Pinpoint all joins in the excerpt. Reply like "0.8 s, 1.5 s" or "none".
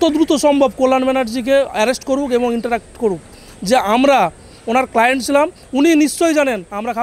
none